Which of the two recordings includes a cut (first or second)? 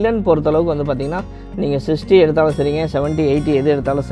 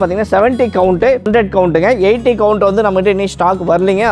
second